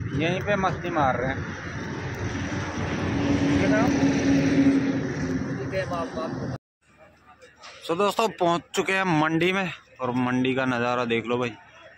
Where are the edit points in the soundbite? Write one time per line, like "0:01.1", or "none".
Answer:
0:06.6